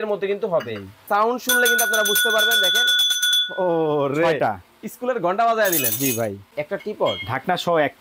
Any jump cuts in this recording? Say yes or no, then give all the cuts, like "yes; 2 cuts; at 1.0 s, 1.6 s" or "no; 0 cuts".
yes; 2 cuts; at 1.0 s, 6.5 s